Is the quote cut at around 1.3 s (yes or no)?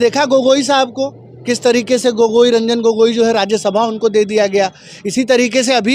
no